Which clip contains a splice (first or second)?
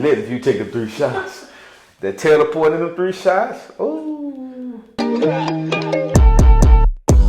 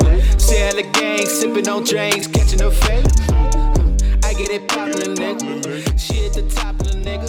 first